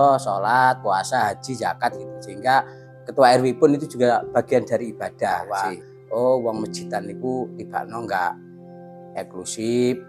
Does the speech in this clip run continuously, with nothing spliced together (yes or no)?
no